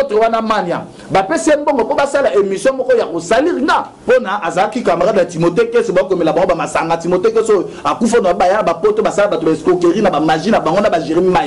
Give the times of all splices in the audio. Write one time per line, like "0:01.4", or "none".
0:03.9